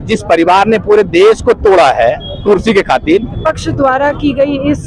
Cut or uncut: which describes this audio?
cut